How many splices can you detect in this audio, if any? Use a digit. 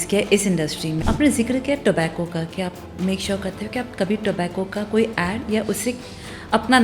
1